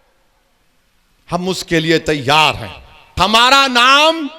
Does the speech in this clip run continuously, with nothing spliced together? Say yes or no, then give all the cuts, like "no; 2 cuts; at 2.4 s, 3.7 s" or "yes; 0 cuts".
no; 1 cut; at 3.2 s